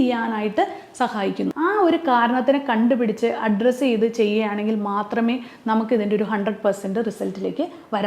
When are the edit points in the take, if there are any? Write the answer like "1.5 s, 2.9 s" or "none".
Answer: 1.5 s